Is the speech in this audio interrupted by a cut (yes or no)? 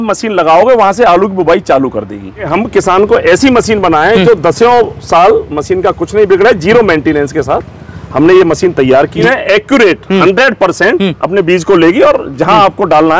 yes